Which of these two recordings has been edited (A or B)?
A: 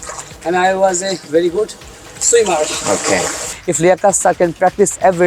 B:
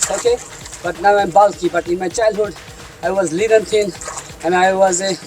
A